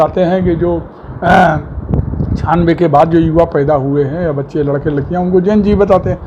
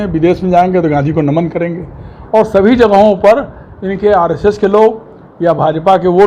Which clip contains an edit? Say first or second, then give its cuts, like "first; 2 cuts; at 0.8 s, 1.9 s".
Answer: second; 1 cut; at 2.1 s